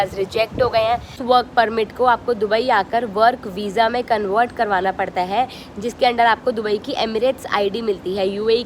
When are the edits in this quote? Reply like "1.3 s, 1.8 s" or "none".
1.2 s